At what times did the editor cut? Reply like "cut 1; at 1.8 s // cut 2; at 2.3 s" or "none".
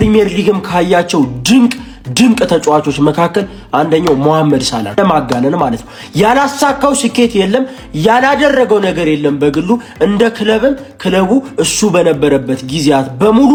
none